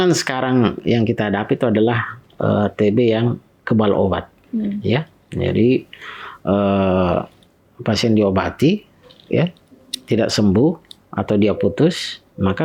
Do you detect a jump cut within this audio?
no; 0 cuts

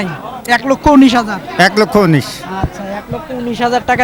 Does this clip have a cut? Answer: no; 0 cuts

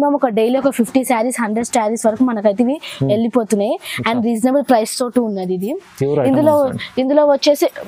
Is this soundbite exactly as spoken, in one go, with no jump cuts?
yes; 0 cuts

